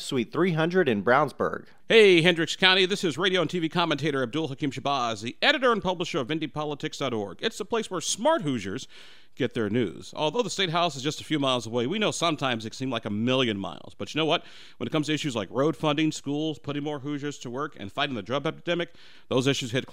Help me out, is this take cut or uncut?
cut